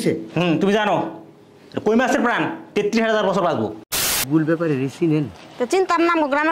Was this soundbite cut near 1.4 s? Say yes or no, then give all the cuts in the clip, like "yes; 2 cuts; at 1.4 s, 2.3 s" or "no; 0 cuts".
no; 1 cut; at 4.2 s